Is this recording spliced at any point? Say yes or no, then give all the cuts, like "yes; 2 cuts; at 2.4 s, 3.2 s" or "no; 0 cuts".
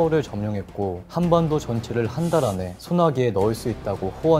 yes; 2 cuts; at 1.0 s, 2.7 s